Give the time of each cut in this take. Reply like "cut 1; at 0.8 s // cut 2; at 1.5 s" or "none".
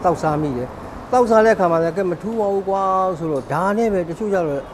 none